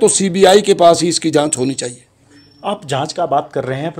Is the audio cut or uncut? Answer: uncut